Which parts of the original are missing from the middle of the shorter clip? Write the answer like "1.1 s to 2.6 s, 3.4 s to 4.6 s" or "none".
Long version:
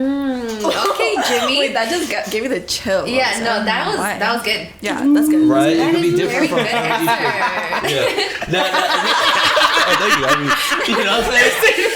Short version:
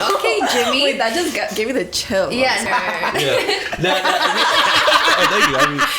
3.4 s to 7.3 s